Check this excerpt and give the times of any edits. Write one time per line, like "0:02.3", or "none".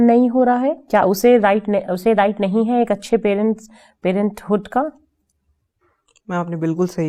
none

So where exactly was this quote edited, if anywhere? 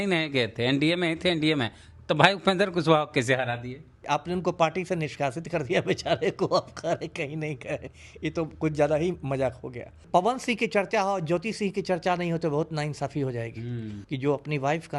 0:04.0
0:10.0
0:13.9

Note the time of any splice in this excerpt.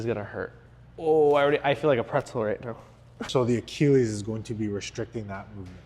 0:03.2

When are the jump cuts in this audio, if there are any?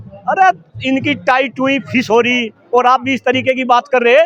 none

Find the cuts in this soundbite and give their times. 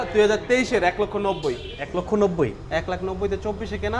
0:01.7

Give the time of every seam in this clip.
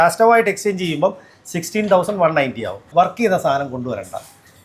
0:02.7

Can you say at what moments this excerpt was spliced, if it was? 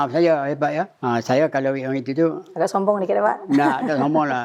0:00.9
0:02.4

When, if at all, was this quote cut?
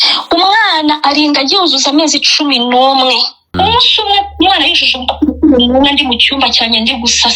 0:03.5

